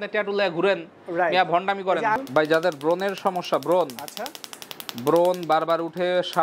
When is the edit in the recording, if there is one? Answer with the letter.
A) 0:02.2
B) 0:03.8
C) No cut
A